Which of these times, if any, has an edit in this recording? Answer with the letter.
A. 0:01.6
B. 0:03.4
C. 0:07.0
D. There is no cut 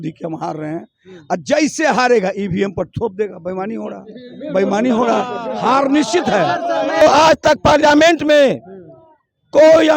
C